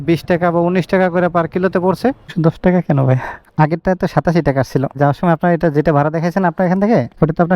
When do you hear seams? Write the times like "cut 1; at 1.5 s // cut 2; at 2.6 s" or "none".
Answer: cut 1; at 2.3 s // cut 2; at 3.4 s // cut 3; at 5.0 s